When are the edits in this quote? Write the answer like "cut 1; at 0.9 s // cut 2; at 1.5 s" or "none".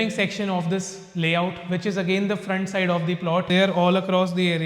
cut 1; at 3.5 s